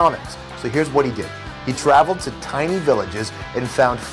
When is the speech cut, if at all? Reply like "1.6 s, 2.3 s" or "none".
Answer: 1.8 s